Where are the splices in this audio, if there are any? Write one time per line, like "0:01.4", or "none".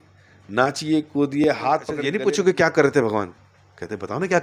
0:02.0